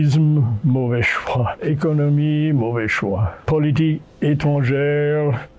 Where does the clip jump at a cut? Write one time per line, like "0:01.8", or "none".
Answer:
0:01.6
0:03.4